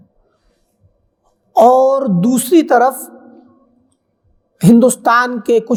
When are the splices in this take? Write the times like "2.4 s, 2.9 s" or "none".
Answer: none